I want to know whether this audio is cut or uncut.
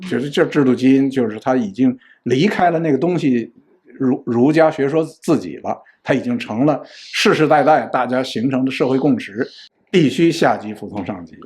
cut